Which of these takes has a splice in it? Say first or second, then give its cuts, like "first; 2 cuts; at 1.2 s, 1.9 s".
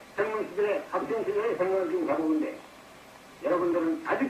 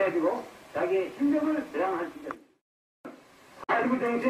second; 1 cut; at 3.1 s